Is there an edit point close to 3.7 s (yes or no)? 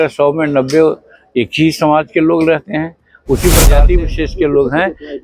yes